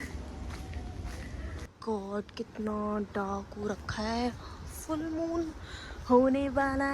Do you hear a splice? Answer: yes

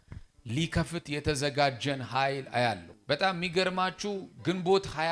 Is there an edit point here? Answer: yes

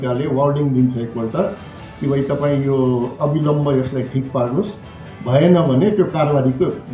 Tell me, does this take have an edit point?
no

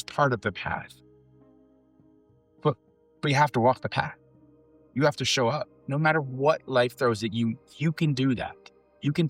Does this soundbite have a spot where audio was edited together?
yes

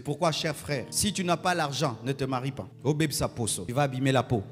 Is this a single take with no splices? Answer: no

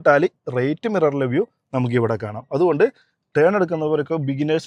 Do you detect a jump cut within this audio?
no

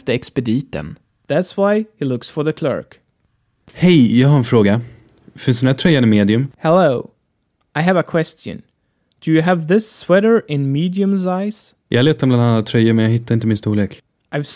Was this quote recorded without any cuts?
yes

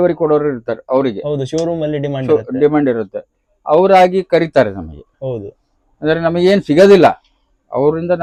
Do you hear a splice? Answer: no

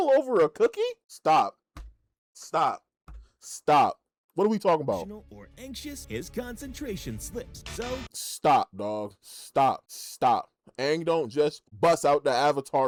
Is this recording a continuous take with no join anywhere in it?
yes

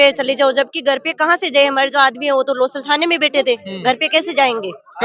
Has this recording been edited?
no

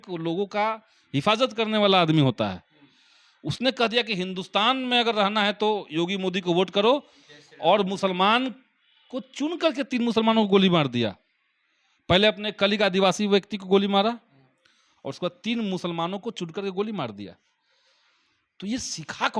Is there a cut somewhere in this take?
no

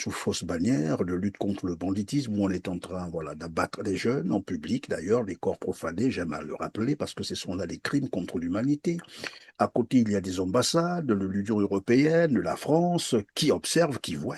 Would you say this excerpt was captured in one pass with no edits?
yes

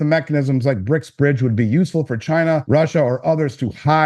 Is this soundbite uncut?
no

